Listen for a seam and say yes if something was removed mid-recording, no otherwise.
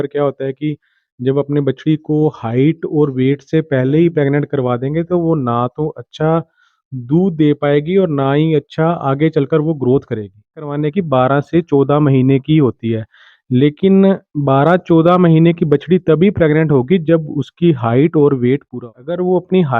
yes